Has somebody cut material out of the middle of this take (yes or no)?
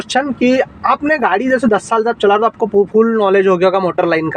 no